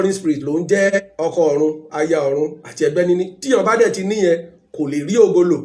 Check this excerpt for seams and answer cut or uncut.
cut